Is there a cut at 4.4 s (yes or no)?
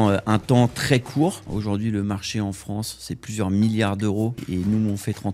yes